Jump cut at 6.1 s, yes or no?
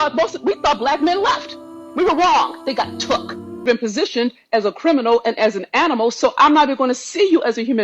no